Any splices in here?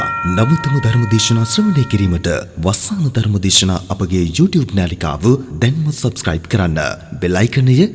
no; 0 cuts

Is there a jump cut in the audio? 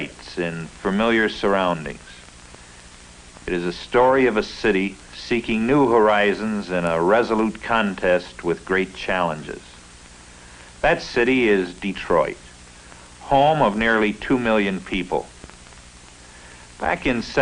no; 0 cuts

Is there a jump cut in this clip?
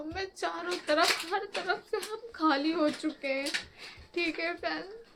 no; 0 cuts

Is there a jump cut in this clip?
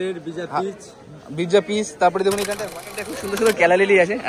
yes; 1 cut; at 2.8 s

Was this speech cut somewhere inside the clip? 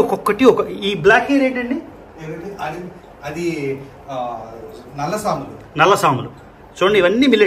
no; 0 cuts

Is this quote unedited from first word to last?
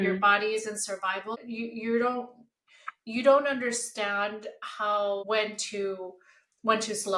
no; 2 cuts; at 1.3 s, 5.2 s

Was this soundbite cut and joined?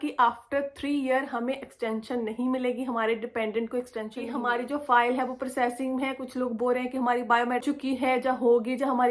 yes; 2 cuts; at 4.2 s, 7.6 s

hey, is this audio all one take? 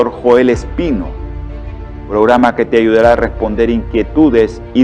yes; 0 cuts

